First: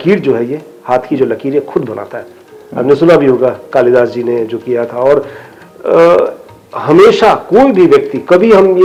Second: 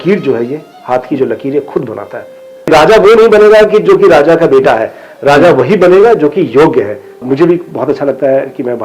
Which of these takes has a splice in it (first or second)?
second